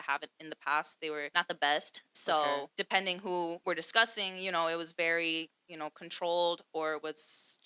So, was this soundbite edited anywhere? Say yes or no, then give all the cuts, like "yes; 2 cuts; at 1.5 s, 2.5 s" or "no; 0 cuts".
yes; 3 cuts; at 1.3 s, 2.7 s, 3.6 s